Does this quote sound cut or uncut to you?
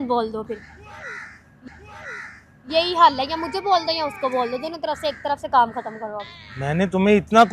uncut